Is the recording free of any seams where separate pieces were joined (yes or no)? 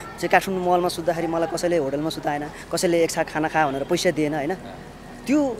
yes